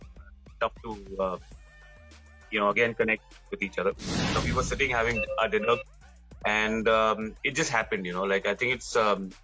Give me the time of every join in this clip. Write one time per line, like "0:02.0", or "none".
0:04.4